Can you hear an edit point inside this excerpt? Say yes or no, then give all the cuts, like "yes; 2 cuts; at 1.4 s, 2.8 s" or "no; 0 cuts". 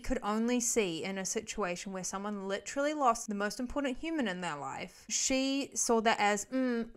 yes; 1 cut; at 3.2 s